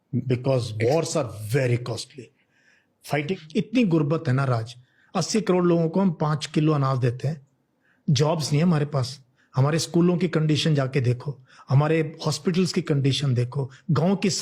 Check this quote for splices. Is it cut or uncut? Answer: cut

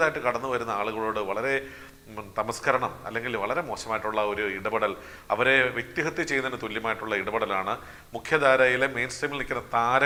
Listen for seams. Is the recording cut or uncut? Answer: uncut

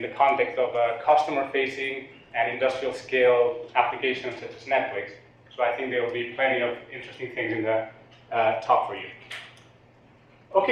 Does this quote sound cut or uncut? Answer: uncut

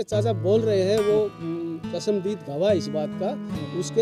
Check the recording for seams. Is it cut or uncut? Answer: uncut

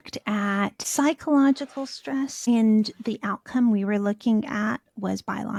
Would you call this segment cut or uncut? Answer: uncut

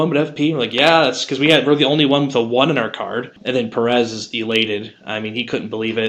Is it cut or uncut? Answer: cut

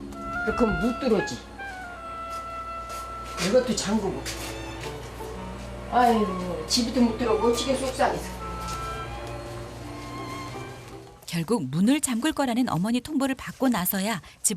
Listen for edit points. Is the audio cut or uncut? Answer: cut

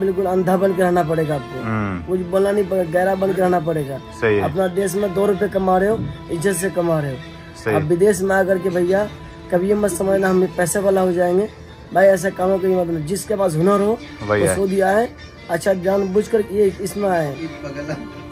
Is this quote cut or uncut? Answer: uncut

